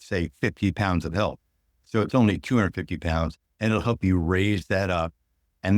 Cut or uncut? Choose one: uncut